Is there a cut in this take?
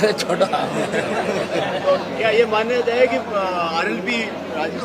no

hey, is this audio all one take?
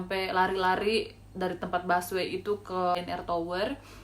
no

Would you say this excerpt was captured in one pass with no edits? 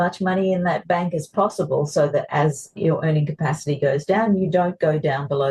yes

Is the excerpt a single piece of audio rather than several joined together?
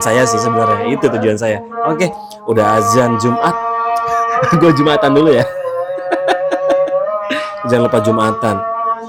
yes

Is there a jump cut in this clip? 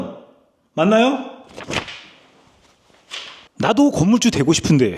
yes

